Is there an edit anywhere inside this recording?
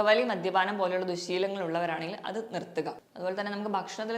yes; 1 cut; at 3.1 s

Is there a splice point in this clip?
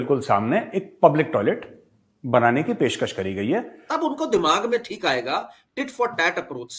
yes; 1 cut; at 3.8 s

